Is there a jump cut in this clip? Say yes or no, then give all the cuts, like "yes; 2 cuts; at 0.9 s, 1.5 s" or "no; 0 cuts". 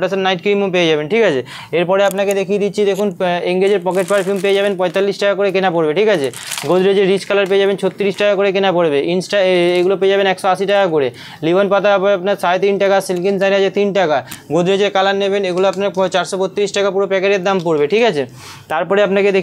no; 0 cuts